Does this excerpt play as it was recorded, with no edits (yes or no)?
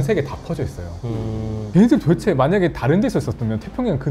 no